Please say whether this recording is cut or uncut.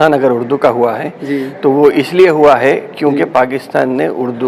uncut